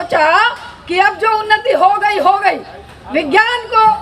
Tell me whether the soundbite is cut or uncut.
uncut